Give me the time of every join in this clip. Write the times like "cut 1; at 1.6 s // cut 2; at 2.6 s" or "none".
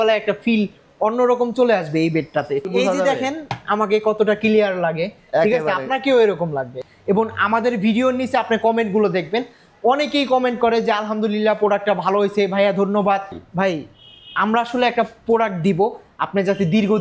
cut 1; at 2.7 s // cut 2; at 6.7 s // cut 3; at 13.4 s

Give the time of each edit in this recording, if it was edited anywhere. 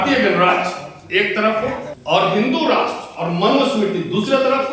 cut 1; at 1.9 s

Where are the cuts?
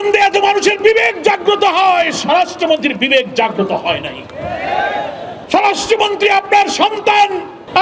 cut 1; at 5.4 s

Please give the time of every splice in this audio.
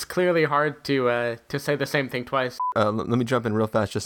cut 1; at 2.6 s

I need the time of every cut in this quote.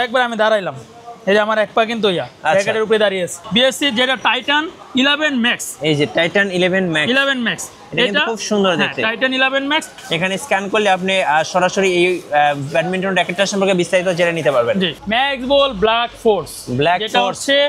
cut 1; at 3.4 s // cut 2; at 9.9 s // cut 3; at 14.9 s

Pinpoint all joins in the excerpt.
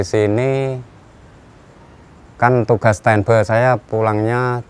none

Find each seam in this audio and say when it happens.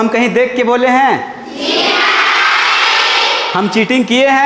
none

